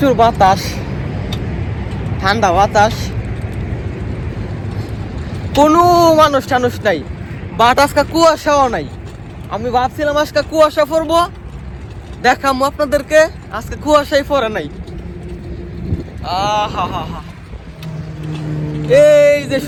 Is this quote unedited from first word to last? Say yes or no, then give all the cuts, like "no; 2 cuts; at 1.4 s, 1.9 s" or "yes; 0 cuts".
yes; 0 cuts